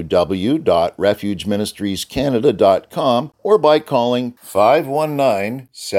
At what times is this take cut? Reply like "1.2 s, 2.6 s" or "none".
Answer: 3.3 s